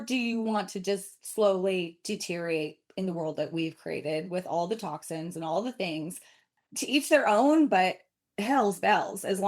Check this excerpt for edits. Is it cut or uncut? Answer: uncut